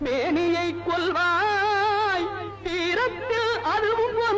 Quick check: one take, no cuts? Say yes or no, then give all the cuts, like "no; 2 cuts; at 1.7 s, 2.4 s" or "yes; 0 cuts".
no; 1 cut; at 1.2 s